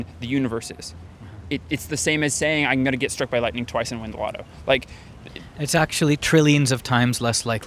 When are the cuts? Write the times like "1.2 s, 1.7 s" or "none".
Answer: none